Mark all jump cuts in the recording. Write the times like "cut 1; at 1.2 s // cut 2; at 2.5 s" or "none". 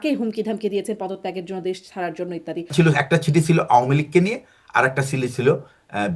cut 1; at 2.7 s